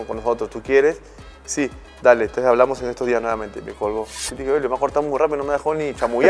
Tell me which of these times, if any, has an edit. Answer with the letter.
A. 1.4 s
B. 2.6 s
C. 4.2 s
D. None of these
C